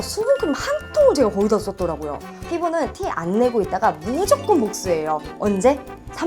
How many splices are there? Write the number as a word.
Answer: one